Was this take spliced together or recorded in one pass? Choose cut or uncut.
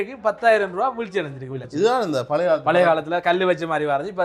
cut